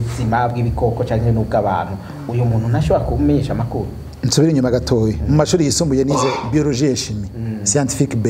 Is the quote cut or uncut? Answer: uncut